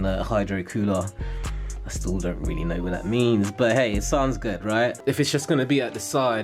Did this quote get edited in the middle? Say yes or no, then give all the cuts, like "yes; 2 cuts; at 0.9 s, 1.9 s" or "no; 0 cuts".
yes; 1 cut; at 5.0 s